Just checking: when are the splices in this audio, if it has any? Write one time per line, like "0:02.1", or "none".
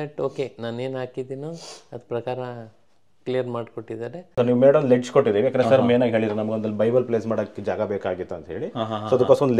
0:04.3